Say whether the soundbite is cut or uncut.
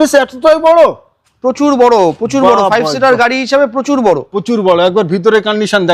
uncut